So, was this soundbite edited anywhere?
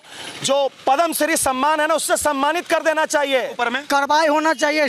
yes; 1 cut; at 3.6 s

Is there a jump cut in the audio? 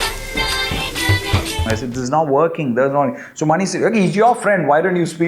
yes; 1 cut; at 1.6 s

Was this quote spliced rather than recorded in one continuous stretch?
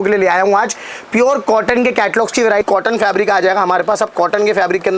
yes; 1 cut; at 2.6 s

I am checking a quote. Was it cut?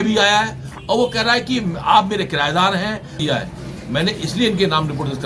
yes; 1 cut; at 3.2 s

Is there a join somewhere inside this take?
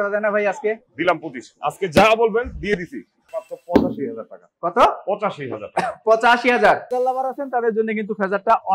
yes; 2 cuts; at 3.3 s, 6.9 s

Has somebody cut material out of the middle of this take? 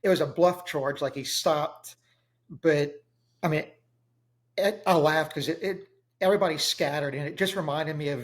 no; 0 cuts

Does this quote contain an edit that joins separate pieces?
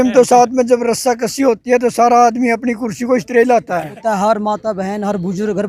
yes; 1 cut; at 4.0 s

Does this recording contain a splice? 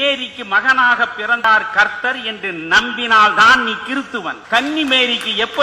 yes; 2 cuts; at 1.4 s, 4.4 s

